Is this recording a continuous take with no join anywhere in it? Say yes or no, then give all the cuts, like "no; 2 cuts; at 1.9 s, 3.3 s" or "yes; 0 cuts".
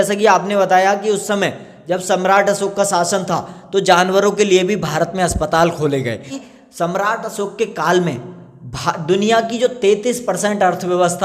no; 1 cut; at 6.4 s